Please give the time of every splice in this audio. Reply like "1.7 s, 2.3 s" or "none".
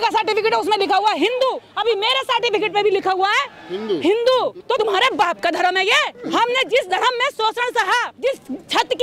1.7 s, 4.7 s, 6.1 s, 8.1 s